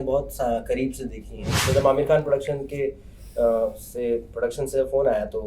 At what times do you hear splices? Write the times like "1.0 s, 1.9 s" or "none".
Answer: 1.5 s